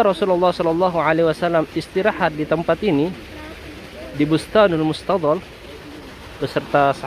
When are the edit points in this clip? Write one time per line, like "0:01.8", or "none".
none